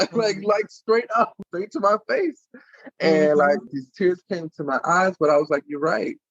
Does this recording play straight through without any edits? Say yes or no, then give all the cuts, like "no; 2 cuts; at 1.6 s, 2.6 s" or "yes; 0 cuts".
no; 2 cuts; at 1.4 s, 3.7 s